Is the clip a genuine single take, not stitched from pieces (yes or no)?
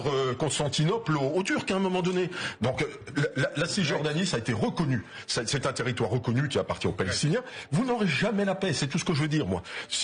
yes